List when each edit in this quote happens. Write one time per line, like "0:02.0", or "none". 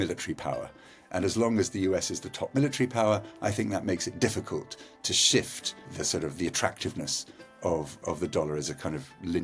0:06.0
0:08.0